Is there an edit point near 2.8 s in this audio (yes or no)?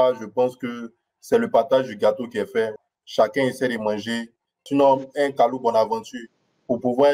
yes